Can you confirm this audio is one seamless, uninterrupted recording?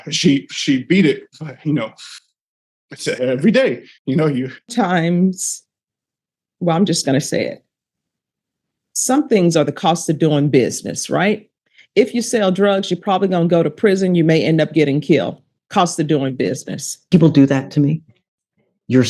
no; 2 cuts; at 4.7 s, 17.0 s

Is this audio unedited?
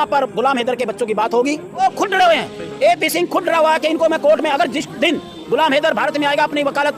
no; 1 cut; at 1.8 s

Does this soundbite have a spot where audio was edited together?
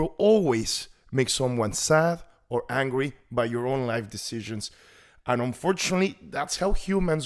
no; 0 cuts

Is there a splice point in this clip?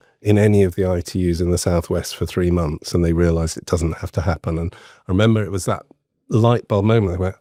no; 0 cuts

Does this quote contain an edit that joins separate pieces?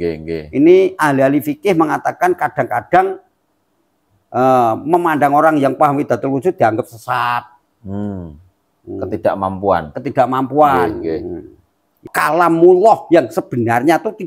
yes; 1 cut; at 12.1 s

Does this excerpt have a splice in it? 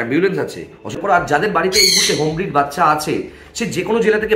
yes; 1 cut; at 1.1 s

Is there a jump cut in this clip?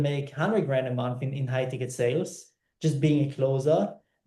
no; 0 cuts

